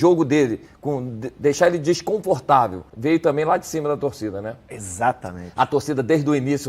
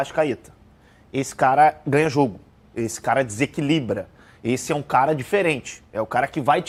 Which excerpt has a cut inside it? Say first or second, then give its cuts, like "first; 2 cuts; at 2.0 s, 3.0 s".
first; 1 cut; at 2.9 s